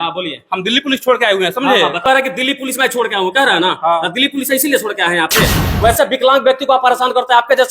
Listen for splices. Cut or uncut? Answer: cut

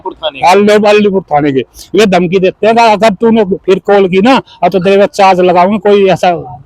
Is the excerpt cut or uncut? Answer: uncut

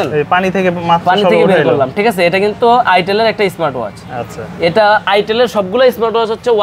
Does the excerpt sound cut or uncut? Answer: uncut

